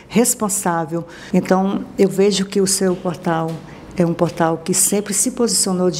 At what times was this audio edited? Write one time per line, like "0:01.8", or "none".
0:01.2

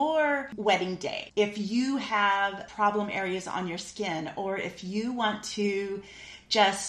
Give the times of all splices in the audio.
0:01.1
0:02.6

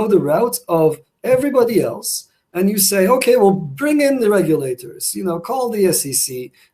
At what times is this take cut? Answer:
none

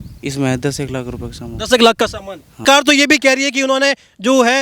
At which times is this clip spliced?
0:02.6

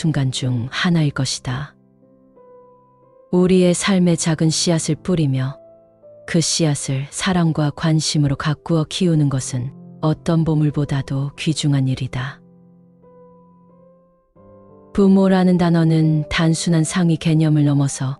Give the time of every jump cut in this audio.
0:12.4
0:14.9

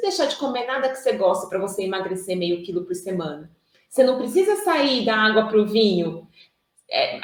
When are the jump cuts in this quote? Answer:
none

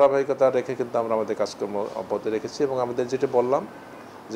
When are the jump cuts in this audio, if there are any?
none

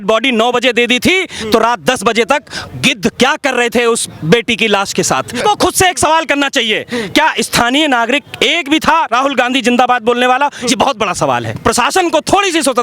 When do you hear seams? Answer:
0:05.3
0:11.5

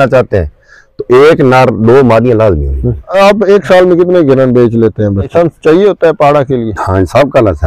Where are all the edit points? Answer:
0:03.1
0:05.3

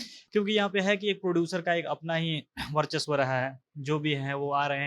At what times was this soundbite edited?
none

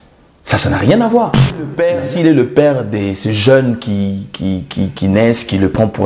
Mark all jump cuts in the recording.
0:01.7

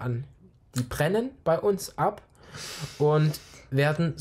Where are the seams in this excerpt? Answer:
none

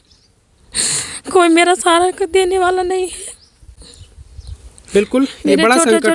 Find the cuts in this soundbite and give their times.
none

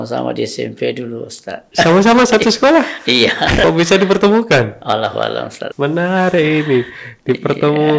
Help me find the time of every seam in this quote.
0:01.7
0:03.6
0:05.6

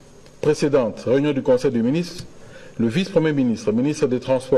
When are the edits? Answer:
none

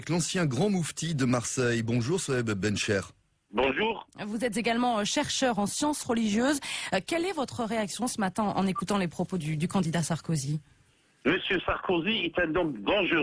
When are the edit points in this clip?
none

